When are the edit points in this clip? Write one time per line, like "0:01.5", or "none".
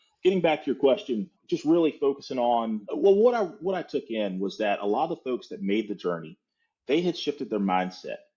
0:01.3
0:02.8

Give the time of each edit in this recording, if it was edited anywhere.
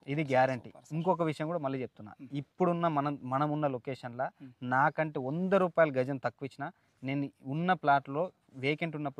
none

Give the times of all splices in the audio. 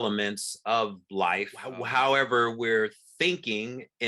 0:01.6

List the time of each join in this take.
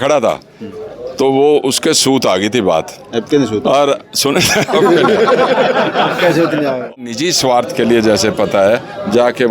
0:07.0

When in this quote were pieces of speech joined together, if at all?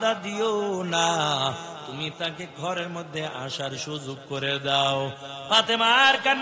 0:05.3

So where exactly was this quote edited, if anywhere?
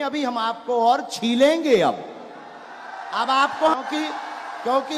0:03.8

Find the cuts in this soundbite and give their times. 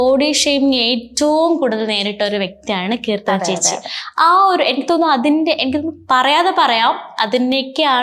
none

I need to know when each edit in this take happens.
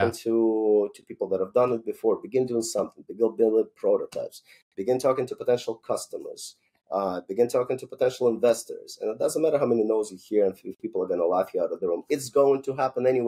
none

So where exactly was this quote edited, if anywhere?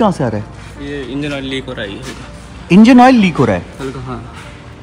none

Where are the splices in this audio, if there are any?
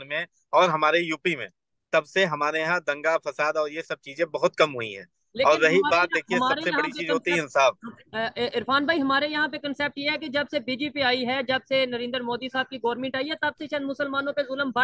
0:05.7

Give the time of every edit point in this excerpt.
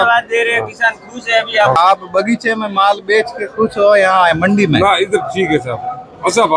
0:01.8

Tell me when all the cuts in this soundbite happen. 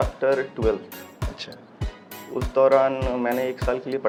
none

